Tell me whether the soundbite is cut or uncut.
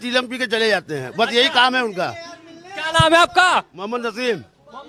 uncut